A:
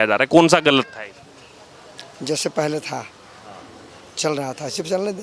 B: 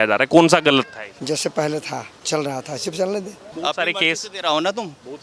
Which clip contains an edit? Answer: B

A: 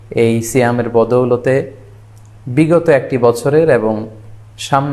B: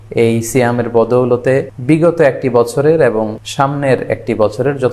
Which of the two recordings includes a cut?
B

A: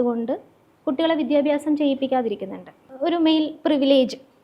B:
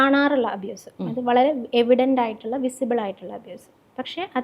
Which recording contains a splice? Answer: A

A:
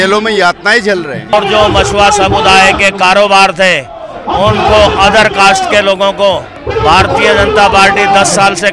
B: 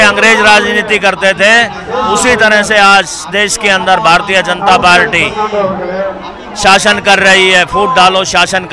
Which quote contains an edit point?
A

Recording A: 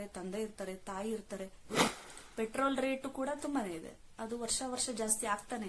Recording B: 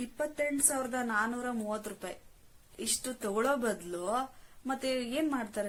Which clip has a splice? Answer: A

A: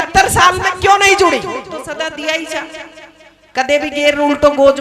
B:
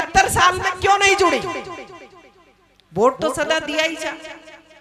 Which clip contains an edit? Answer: A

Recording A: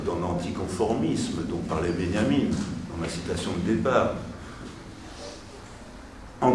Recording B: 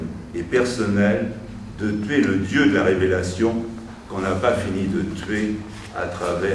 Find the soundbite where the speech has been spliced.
A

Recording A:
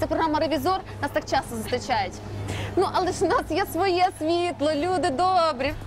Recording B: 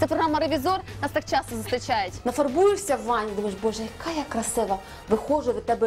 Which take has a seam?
B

